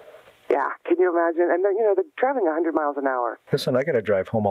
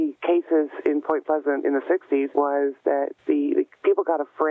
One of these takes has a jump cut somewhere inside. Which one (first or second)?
second